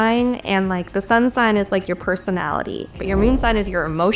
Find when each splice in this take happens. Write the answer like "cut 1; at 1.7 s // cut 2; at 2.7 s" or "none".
cut 1; at 3.0 s